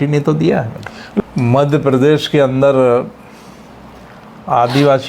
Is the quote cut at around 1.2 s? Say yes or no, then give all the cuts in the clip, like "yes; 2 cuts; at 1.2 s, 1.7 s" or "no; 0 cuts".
yes; 1 cut; at 1.2 s